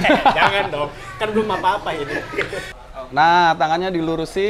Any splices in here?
yes; 1 cut; at 2.7 s

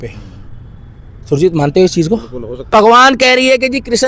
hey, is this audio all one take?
no; 1 cut; at 2.7 s

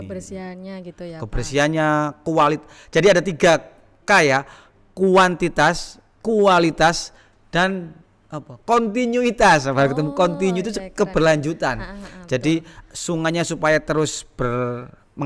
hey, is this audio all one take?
yes; 0 cuts

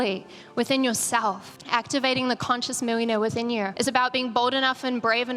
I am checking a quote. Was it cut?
yes; 2 cuts; at 1.5 s, 3.7 s

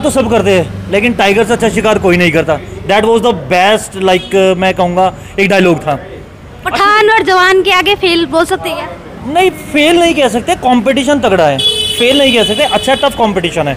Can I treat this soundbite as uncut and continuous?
yes; 0 cuts

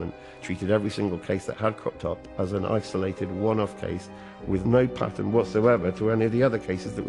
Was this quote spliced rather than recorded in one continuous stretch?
no; 0 cuts

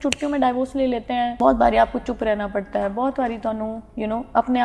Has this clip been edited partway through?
yes; 1 cut; at 1.4 s

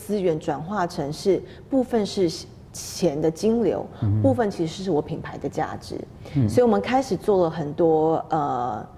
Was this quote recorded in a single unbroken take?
yes; 0 cuts

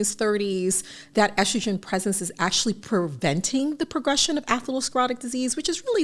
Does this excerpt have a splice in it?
no; 0 cuts

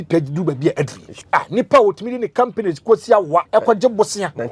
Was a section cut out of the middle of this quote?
yes; 2 cuts; at 1.1 s, 3.5 s

